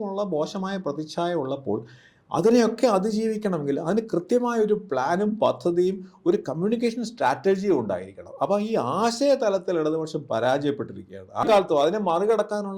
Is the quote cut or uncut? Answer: cut